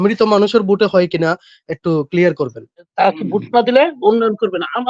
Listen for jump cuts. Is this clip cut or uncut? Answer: cut